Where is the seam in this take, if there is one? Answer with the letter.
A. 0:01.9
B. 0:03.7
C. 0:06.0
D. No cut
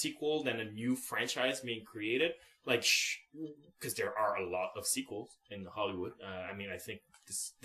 D